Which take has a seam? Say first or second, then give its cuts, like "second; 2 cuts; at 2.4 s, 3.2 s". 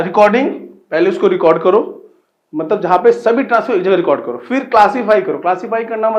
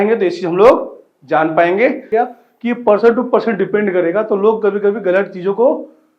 second; 1 cut; at 2.1 s